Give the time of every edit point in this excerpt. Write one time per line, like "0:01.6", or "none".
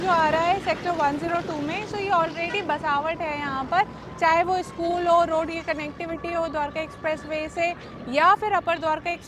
none